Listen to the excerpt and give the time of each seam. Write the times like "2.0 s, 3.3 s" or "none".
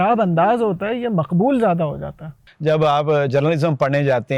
2.4 s